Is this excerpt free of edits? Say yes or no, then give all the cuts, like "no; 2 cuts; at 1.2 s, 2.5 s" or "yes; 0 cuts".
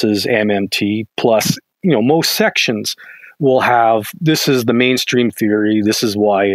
yes; 0 cuts